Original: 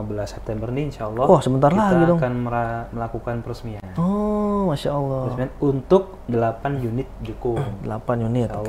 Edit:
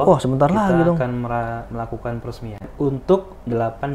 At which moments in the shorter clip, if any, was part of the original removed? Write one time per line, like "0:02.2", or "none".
0:02.7